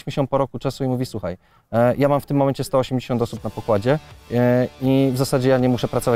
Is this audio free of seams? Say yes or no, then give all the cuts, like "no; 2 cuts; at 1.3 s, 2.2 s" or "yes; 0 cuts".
yes; 0 cuts